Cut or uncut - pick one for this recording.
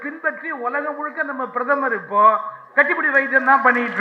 uncut